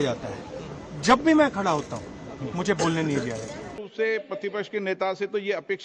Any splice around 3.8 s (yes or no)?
yes